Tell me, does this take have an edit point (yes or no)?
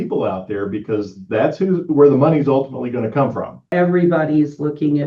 yes